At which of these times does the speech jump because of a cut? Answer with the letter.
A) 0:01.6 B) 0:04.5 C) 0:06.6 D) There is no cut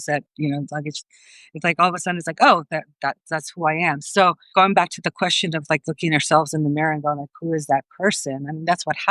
B